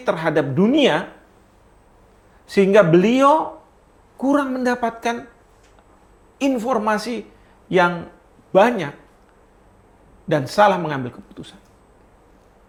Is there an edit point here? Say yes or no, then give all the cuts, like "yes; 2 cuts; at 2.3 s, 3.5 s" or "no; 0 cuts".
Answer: no; 0 cuts